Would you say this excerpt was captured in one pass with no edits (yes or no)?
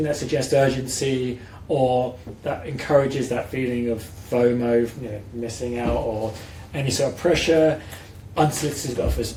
yes